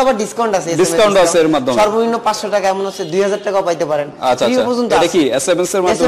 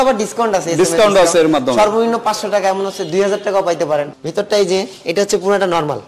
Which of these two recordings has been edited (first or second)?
second